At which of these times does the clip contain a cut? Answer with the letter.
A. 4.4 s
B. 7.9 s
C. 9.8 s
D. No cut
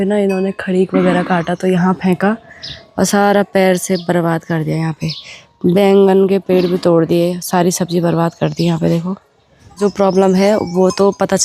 C